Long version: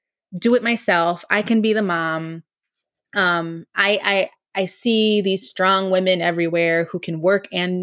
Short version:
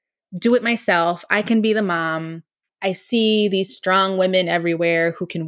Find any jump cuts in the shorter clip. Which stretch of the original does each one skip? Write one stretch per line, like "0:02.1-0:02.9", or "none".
0:02.7-0:04.4